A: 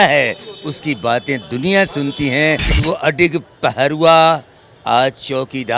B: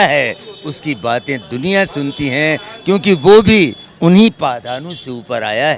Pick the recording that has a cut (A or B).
A